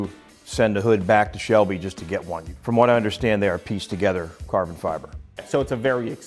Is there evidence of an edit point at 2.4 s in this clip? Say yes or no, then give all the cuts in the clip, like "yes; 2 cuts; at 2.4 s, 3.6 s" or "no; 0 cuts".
yes; 2 cuts; at 2.4 s, 5.3 s